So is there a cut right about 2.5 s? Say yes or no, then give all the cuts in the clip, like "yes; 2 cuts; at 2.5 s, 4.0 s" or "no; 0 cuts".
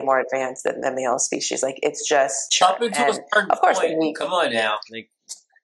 yes; 1 cut; at 2.5 s